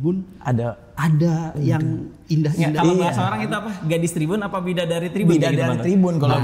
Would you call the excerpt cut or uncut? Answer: uncut